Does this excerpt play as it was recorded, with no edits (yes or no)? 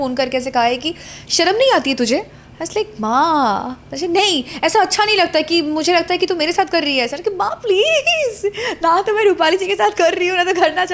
yes